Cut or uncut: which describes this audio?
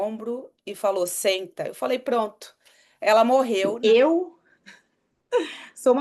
cut